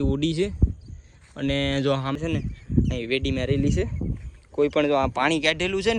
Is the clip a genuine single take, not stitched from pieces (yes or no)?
no